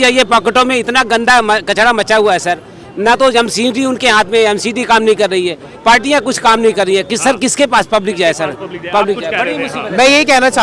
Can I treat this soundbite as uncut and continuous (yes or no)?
yes